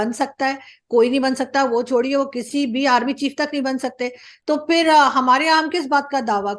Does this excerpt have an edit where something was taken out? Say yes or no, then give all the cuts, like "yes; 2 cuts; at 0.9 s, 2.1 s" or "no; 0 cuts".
no; 0 cuts